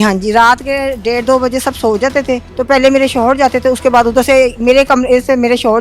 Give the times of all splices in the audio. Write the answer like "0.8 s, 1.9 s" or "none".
2.5 s